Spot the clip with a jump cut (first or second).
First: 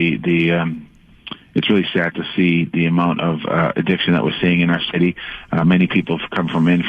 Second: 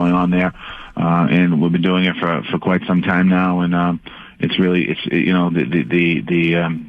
first